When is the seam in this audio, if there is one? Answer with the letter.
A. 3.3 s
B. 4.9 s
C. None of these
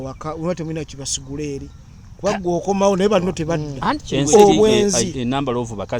B